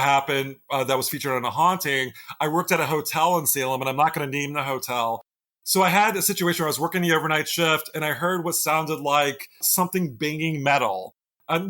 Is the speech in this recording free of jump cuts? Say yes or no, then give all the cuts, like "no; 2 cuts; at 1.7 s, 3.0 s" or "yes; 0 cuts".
no; 1 cut; at 5.5 s